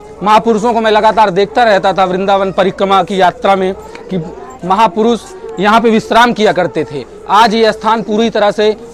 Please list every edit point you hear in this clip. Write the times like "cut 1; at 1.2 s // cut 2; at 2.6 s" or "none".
none